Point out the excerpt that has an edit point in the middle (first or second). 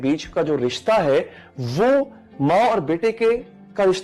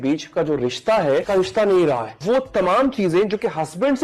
second